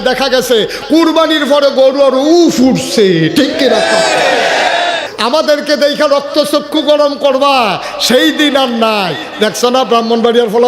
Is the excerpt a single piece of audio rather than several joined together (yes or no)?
no